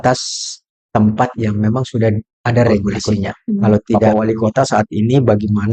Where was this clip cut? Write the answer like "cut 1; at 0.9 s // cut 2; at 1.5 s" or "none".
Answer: cut 1; at 4.1 s